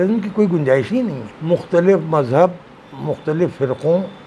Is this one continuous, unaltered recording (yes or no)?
no